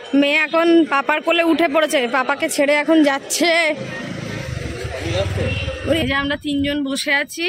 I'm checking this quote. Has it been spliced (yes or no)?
yes